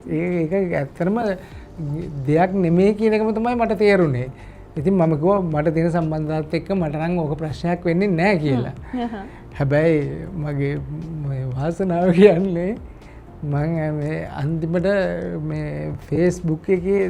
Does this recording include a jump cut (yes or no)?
no